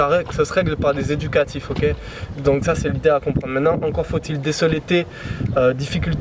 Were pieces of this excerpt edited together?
no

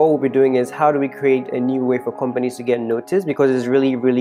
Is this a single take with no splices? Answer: yes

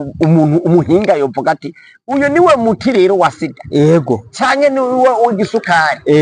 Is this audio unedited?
yes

